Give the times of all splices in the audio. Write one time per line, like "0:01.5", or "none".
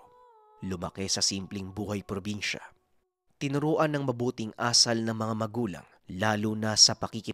none